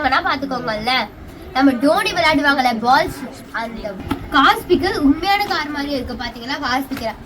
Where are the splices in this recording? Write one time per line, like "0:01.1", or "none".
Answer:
0:04.0